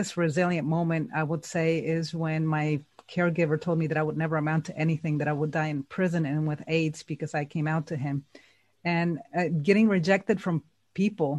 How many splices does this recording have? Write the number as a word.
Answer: zero